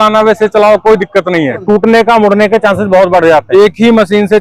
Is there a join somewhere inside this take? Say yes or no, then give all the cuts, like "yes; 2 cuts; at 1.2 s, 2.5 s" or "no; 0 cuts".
yes; 2 cuts; at 1.6 s, 3.5 s